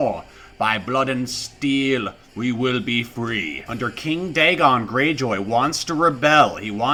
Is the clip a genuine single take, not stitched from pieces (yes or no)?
yes